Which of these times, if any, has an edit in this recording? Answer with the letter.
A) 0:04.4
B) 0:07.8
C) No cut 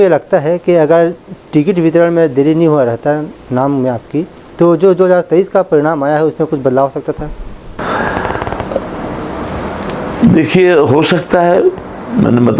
C